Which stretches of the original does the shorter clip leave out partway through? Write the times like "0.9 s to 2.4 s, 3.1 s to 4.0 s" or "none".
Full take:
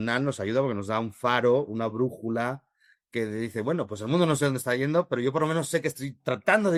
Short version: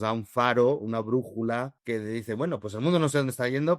2.6 s to 3.0 s

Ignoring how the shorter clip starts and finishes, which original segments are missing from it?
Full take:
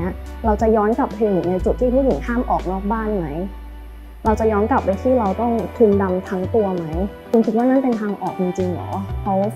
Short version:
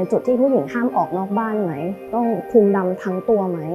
3.6 s to 5.4 s

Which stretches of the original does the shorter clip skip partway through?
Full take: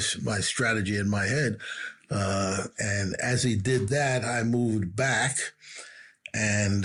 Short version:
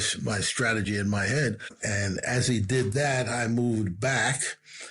1.8 s to 2.7 s

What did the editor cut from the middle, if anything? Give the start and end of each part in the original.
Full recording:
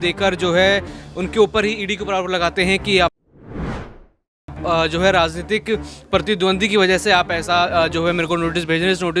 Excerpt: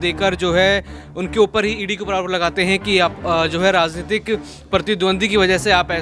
3.2 s to 4.6 s

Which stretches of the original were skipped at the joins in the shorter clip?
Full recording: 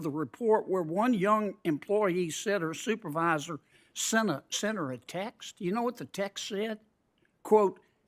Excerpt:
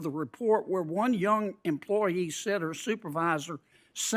none

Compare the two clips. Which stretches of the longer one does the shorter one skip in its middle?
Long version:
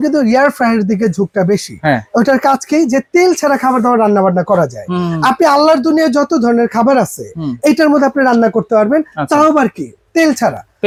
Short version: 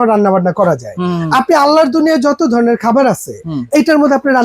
none

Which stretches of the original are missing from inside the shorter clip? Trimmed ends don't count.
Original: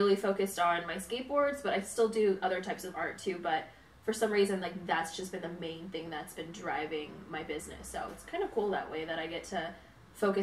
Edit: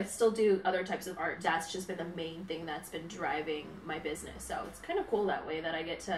3.1 s to 4.8 s

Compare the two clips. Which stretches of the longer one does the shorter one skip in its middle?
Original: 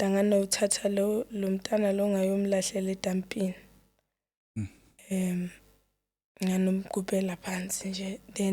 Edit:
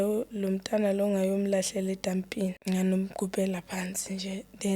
3.6 s to 6.3 s

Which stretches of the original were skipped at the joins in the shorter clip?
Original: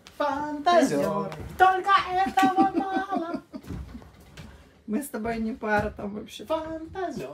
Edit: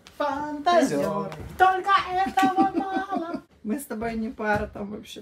3.5 s to 4.7 s

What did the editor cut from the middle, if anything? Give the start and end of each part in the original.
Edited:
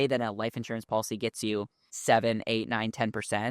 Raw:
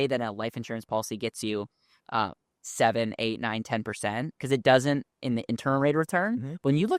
1.8 s to 2.6 s

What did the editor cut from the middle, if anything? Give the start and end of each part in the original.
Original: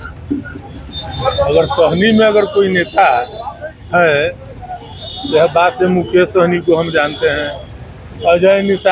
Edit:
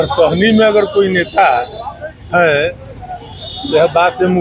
none

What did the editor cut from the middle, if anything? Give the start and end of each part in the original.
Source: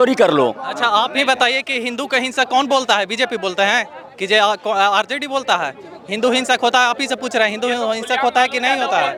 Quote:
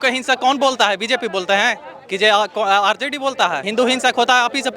5.7 s to 6.1 s

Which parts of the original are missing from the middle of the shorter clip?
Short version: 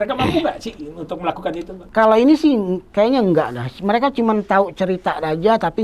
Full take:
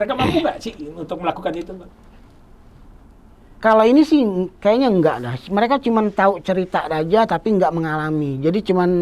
1.8 s to 3.5 s

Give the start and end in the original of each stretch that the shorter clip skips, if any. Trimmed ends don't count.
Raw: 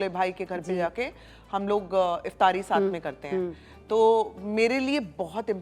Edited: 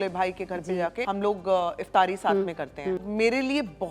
1.0 s to 1.5 s, 3.5 s to 4.4 s

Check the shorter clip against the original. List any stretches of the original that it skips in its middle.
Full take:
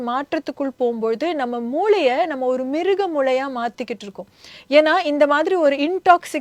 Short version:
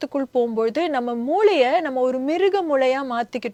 none

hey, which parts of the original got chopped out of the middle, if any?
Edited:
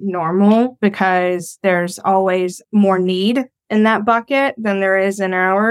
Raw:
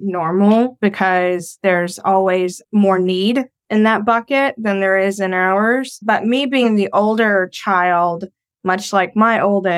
none

